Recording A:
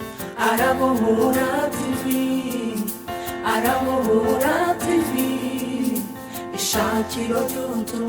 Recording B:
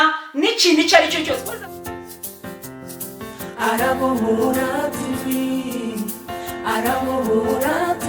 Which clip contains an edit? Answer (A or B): B